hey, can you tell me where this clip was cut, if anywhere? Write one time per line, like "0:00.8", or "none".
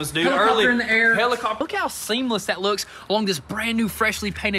0:01.6